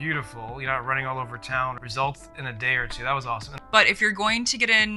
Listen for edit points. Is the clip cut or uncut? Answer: cut